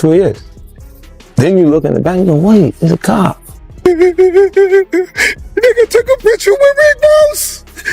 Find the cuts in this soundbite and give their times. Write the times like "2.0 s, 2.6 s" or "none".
3.8 s